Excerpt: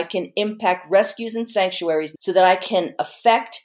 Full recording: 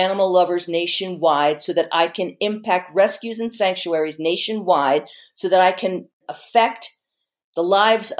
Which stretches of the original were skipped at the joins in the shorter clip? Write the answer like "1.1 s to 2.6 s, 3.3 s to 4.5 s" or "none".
4.1 s to 5.3 s, 5.9 s to 6.0 s